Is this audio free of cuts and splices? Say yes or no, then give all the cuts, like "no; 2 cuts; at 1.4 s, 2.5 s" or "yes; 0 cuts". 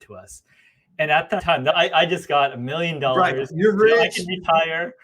no; 1 cut; at 1.6 s